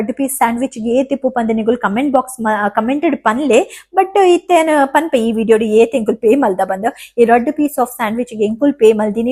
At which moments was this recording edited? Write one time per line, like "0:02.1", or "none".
none